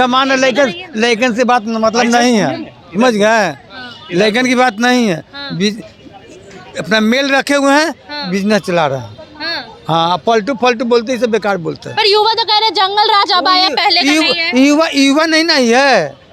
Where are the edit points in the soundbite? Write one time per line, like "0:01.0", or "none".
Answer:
none